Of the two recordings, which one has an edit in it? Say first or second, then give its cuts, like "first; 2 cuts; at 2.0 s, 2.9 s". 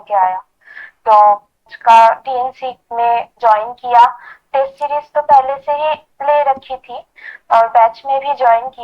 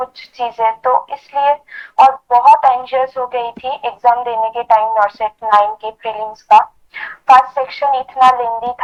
first; 1 cut; at 1.7 s